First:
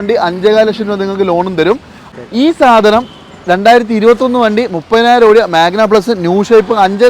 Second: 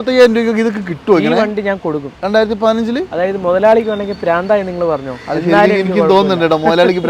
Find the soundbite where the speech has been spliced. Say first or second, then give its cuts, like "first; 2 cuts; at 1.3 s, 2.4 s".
first; 1 cut; at 2.0 s